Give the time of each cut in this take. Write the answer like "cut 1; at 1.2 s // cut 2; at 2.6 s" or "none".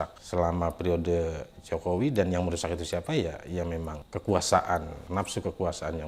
cut 1; at 4.0 s // cut 2; at 5.0 s

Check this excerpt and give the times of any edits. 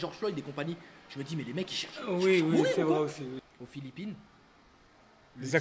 cut 1; at 3.4 s

